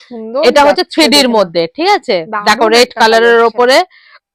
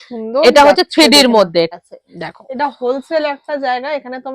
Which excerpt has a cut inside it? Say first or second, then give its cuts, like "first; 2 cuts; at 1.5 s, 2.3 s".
second; 1 cut; at 1.7 s